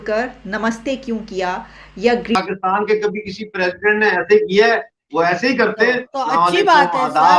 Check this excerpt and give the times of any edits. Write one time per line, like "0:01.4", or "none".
0:02.4